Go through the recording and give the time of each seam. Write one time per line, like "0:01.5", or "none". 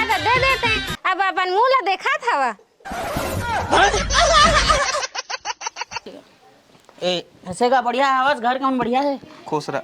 0:06.2